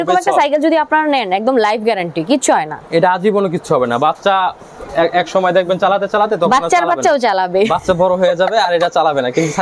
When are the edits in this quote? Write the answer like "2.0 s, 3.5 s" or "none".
none